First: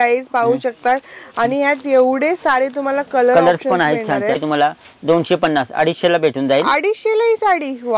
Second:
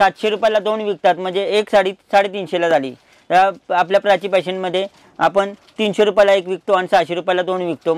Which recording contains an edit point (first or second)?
first